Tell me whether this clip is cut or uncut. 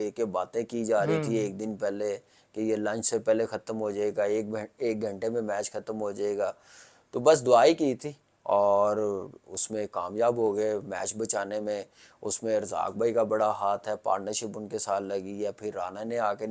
uncut